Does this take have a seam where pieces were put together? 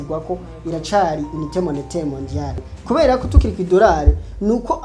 yes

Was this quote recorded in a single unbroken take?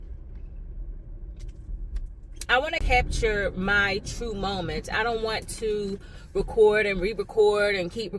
no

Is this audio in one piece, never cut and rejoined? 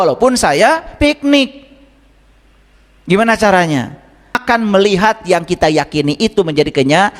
no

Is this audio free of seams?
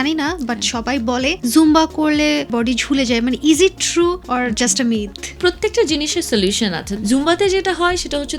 no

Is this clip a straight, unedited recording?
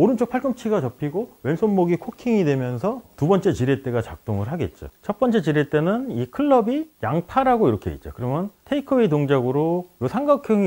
no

